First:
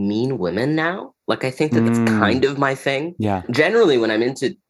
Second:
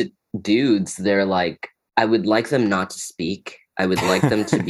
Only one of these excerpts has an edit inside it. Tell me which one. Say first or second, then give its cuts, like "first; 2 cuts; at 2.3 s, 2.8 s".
first; 2 cuts; at 2.2 s, 3.5 s